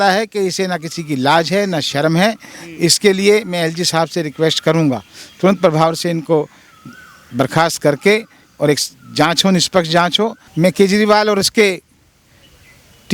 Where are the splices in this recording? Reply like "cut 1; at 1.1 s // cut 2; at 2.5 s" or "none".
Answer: cut 1; at 10.4 s

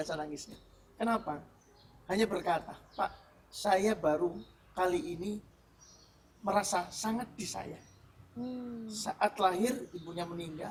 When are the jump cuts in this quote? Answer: none

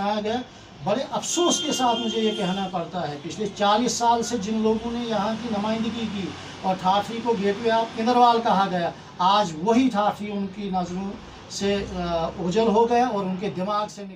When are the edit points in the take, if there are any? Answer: none

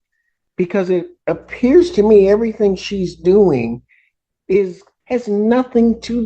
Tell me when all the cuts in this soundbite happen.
cut 1; at 4.9 s

